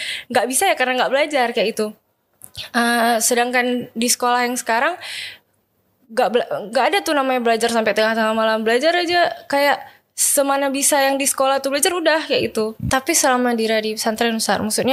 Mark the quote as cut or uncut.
cut